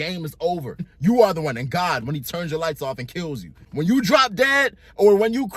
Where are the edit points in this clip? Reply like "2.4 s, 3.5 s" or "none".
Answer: 0.9 s, 3.5 s